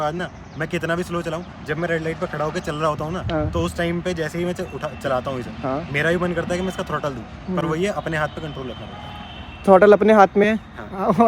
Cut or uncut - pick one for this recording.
uncut